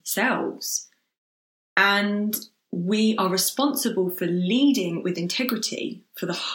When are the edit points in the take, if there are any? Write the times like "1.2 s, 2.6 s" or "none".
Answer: none